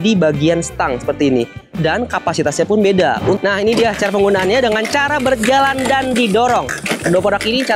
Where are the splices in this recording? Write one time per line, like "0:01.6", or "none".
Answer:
0:03.4

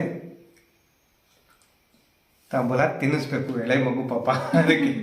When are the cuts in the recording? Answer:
none

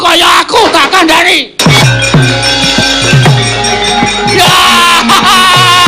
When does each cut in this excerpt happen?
0:01.8

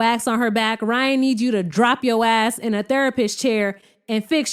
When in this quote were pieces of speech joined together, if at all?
none

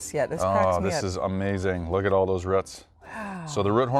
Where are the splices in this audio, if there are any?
none

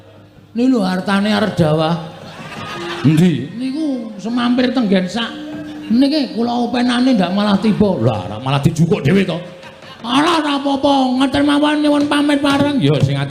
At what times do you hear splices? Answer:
none

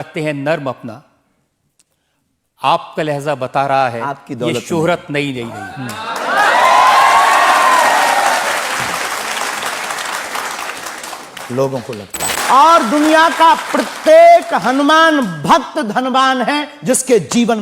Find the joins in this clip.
0:12.3

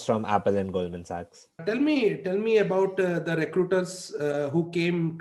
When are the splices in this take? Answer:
0:01.6

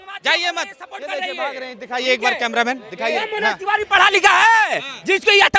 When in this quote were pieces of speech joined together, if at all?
none

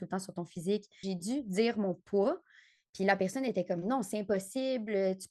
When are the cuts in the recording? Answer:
0:01.1

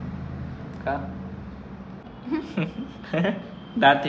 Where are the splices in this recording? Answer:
0:02.1

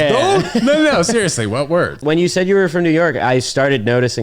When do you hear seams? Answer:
0:02.0

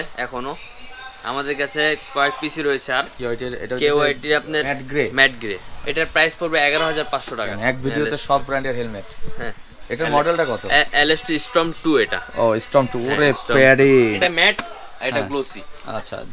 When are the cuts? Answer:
0:03.1
0:04.8
0:05.7
0:07.5
0:14.2

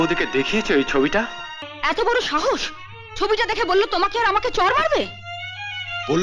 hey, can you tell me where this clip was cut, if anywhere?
0:01.6

